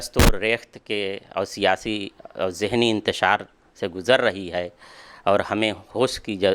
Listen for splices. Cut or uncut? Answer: uncut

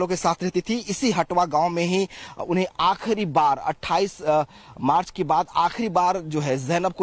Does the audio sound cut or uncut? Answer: uncut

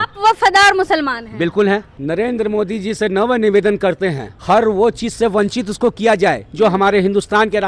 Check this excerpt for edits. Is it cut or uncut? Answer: cut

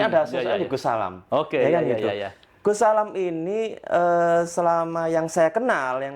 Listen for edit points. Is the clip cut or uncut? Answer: uncut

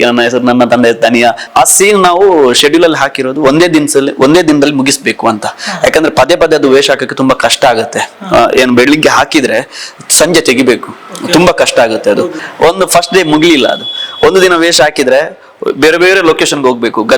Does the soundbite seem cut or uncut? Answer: cut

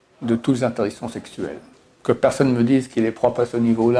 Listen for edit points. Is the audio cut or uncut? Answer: cut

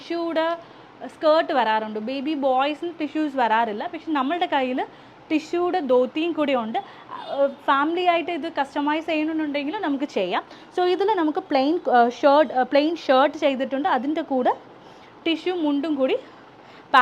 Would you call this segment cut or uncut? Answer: uncut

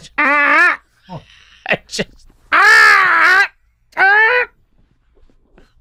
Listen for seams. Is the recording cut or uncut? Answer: uncut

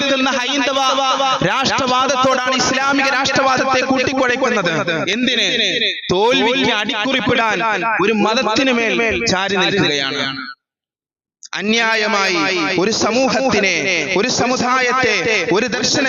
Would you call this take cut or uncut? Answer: uncut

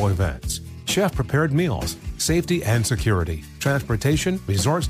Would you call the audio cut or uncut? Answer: uncut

